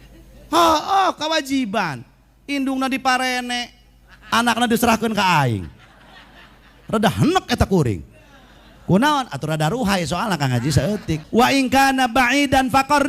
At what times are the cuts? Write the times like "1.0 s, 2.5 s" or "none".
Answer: 11.2 s